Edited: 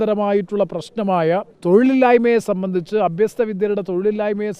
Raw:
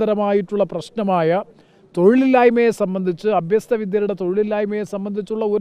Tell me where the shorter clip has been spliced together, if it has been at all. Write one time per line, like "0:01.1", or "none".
0:01.5